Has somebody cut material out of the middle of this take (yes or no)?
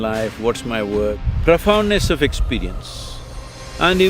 yes